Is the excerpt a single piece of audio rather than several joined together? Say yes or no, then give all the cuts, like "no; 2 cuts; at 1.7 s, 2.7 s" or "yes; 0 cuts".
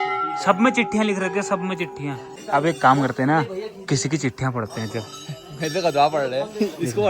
no; 1 cut; at 2.3 s